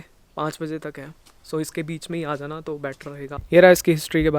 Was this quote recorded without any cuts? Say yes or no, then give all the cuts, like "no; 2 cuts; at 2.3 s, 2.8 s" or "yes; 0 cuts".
yes; 0 cuts